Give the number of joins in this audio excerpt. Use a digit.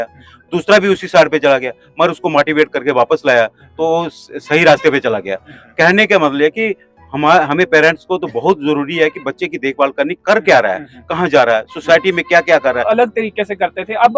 1